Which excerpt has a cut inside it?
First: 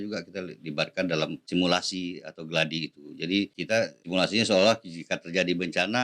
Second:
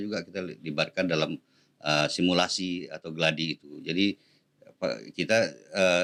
first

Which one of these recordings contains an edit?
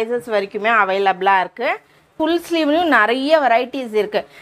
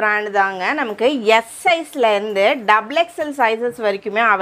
first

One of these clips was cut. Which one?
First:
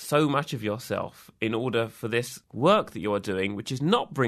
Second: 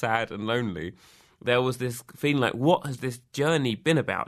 first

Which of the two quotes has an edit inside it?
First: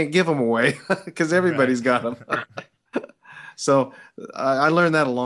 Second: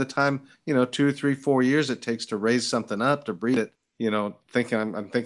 second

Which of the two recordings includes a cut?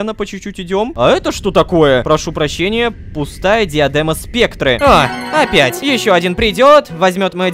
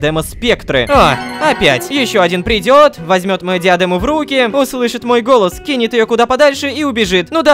first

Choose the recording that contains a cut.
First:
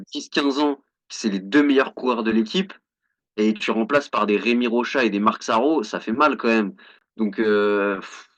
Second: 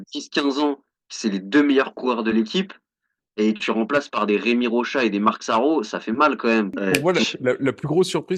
second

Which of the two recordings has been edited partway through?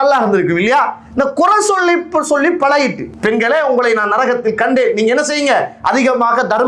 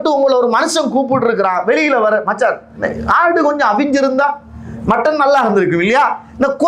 first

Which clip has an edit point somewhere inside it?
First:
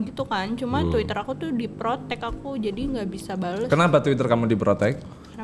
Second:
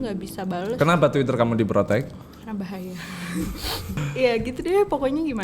second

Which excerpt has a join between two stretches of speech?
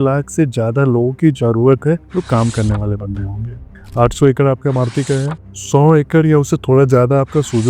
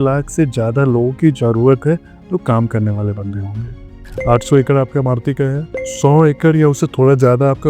first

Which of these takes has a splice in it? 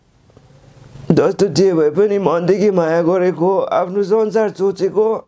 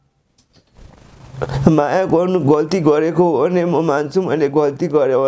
second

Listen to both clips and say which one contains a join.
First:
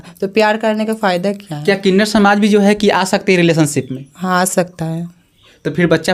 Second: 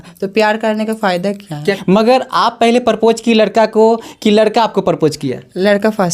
second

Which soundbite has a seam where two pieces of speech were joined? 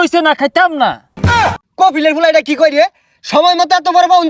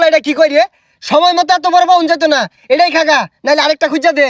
first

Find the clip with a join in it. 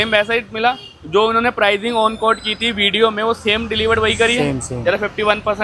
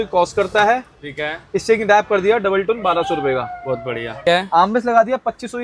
second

